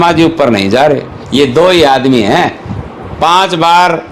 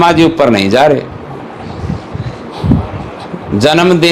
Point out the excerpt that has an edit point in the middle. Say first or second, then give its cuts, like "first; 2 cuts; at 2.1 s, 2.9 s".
first; 1 cut; at 1.2 s